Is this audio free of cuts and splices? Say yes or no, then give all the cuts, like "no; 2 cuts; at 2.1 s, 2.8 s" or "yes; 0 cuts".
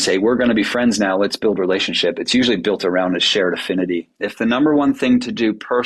no; 1 cut; at 4.2 s